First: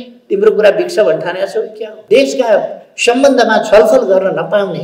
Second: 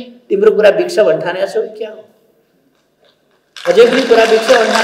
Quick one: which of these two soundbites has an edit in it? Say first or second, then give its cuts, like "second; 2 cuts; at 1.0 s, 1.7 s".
first; 1 cut; at 1.9 s